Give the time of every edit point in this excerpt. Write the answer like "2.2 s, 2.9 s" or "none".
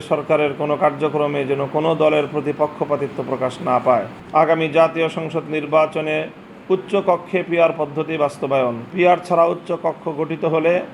4.1 s, 8.8 s